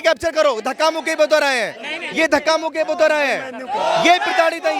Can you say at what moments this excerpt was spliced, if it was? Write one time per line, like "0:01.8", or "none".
none